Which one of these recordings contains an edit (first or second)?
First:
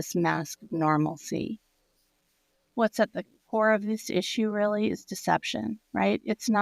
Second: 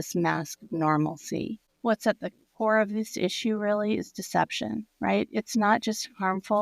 second